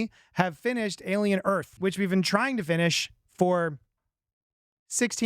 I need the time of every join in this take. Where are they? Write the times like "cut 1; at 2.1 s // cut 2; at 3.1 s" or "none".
cut 1; at 1.8 s